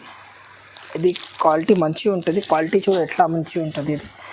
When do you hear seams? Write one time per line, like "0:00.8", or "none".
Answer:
none